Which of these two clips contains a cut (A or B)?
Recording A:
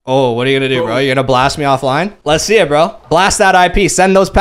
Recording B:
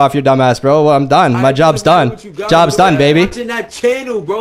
A